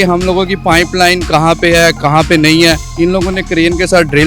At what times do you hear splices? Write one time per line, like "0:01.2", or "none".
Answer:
0:02.9